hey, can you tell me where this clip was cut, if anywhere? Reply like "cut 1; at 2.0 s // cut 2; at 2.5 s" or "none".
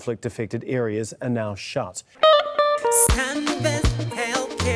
cut 1; at 2.0 s